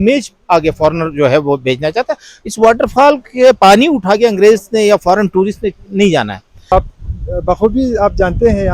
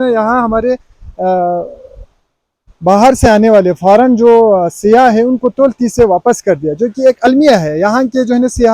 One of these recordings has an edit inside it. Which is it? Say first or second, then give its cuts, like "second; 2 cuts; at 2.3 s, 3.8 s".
first; 1 cut; at 6.7 s